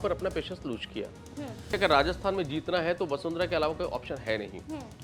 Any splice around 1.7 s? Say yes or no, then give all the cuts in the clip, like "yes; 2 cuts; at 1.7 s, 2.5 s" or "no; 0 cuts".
yes; 1 cut; at 1.7 s